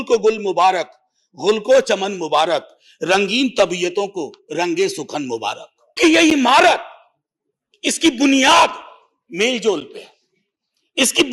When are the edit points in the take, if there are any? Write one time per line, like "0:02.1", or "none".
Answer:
0:06.0